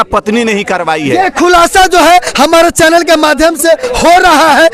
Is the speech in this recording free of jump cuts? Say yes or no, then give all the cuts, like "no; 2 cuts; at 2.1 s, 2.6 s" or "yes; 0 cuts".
yes; 0 cuts